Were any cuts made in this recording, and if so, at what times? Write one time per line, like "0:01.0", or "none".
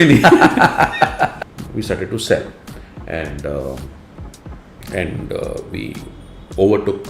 0:01.4